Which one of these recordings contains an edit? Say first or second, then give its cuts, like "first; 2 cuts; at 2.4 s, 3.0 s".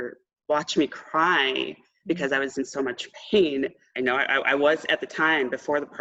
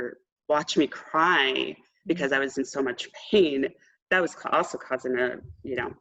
first; 1 cut; at 3.9 s